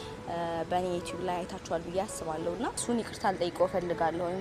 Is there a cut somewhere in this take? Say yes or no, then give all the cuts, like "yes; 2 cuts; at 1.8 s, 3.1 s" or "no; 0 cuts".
yes; 1 cut; at 2.8 s